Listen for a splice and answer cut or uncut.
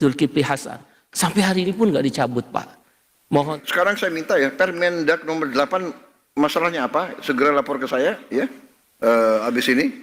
cut